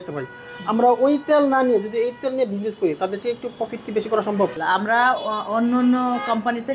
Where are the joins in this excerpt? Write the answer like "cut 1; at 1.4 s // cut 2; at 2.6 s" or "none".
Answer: cut 1; at 4.6 s